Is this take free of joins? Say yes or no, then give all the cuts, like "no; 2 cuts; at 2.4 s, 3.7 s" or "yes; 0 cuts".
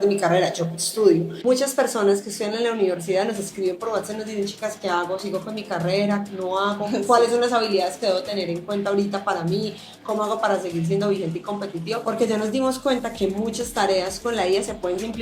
no; 1 cut; at 1.3 s